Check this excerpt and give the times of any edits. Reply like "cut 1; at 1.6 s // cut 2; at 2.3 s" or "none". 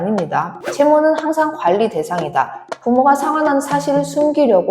cut 1; at 2.7 s